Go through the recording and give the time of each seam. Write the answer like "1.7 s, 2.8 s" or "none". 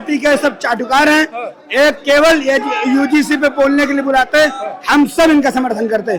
none